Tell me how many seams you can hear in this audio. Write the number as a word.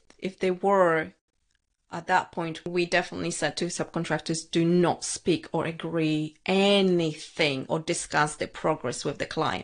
one